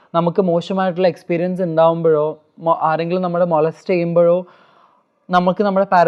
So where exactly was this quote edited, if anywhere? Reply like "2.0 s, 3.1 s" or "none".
none